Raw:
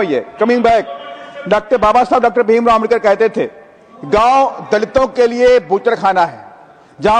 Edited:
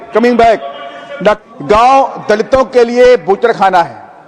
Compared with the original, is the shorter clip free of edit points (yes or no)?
no